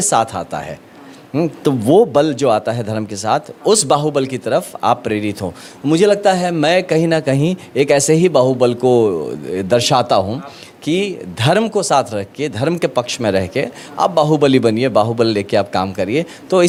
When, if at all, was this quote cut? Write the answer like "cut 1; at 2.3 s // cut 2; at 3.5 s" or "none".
none